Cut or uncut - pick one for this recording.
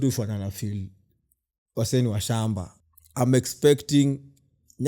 cut